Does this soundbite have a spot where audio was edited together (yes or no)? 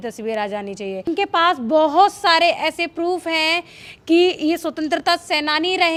no